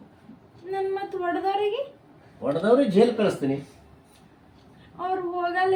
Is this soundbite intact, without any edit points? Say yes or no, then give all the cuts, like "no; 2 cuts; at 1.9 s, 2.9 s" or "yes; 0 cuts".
yes; 0 cuts